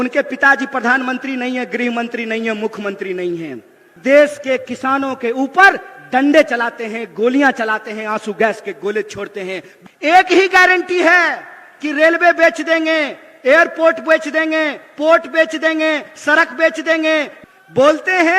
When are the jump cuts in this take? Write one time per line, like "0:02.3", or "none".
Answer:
0:03.9
0:09.7
0:17.4